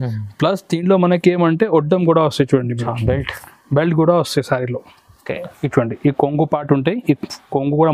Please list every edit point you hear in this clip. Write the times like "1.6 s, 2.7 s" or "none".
5.5 s